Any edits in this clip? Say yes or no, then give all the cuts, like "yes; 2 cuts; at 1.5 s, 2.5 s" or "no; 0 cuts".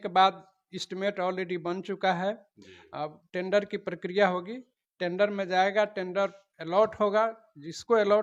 no; 0 cuts